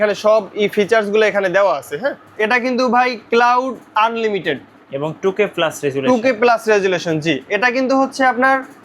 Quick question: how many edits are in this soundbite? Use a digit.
1